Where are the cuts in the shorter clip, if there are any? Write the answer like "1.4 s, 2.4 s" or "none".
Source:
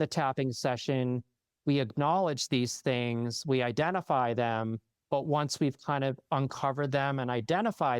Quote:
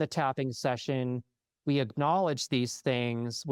none